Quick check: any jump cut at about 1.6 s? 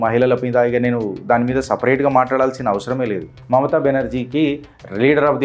no; 1 cut; at 3.4 s

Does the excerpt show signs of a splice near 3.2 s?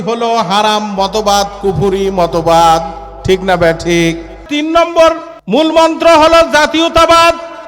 no; 2 cuts; at 4.5 s, 5.3 s

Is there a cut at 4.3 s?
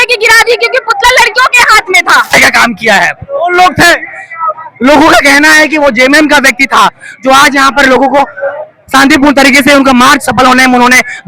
no; 1 cut; at 2.3 s

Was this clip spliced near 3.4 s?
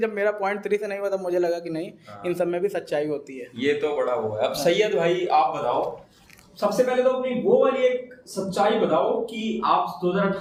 no; 0 cuts

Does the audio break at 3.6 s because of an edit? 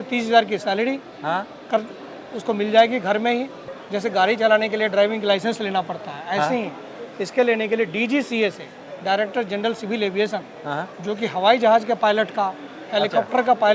yes; 1 cut; at 3.6 s

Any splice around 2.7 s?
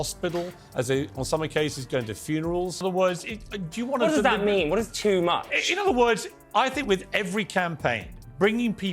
yes; 1 cut; at 2.7 s

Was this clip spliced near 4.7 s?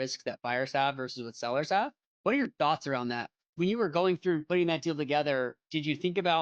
no; 2 cuts; at 2.1 s, 3.5 s

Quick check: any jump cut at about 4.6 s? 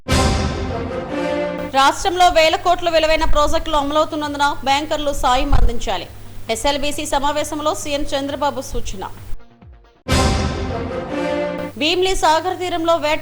no; 1 cut; at 1.4 s

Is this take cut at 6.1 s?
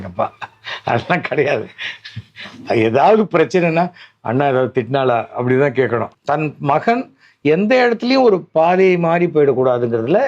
yes; 1 cut; at 6.1 s

